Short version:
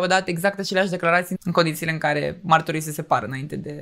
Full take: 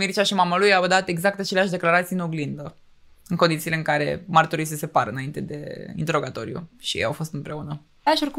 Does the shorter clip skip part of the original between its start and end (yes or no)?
yes